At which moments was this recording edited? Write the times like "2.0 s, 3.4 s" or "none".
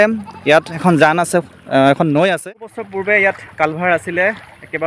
2.4 s